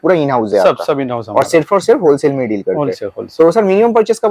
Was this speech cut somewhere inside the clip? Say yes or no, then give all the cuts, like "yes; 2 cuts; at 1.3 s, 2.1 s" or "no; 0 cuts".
no; 0 cuts